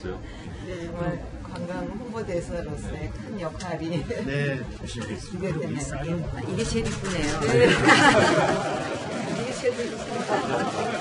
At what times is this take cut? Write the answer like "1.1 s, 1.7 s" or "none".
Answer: 7.0 s